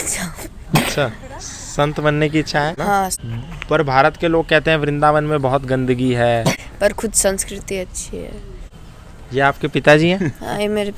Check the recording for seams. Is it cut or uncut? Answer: cut